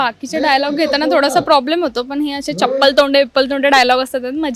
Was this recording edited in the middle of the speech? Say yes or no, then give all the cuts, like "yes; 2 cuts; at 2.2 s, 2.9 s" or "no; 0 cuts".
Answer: no; 0 cuts